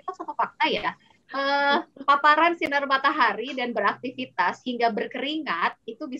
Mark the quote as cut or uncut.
cut